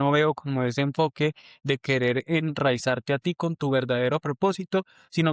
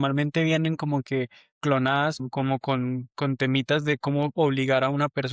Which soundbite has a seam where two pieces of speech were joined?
second; 1 cut; at 2.2 s

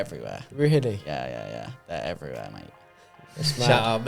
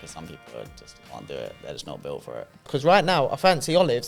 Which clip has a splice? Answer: second; 1 cut; at 2.6 s

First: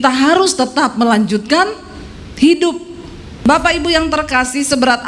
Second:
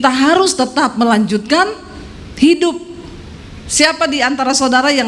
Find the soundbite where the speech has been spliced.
first; 1 cut; at 3.4 s

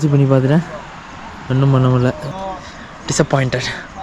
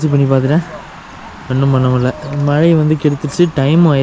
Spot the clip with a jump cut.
first; 1 cut; at 2.2 s

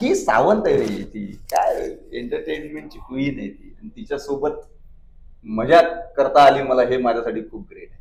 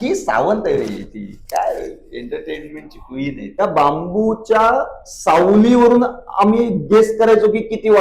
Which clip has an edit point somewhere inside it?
second; 1 cut; at 3.5 s

